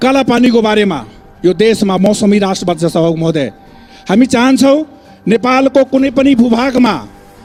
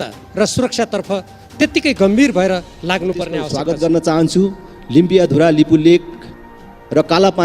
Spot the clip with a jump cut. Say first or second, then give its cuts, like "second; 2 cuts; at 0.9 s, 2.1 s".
second; 1 cut; at 3.5 s